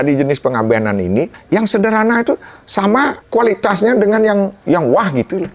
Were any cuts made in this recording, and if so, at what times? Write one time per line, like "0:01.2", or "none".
0:01.4
0:03.2
0:04.6